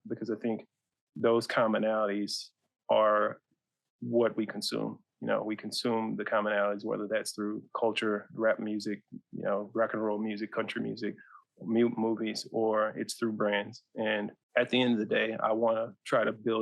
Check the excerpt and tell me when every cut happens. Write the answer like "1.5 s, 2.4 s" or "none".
14.4 s